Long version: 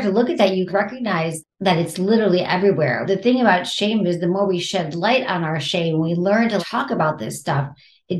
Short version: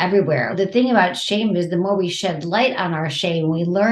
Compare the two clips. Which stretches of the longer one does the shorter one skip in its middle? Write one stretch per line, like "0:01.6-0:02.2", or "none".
none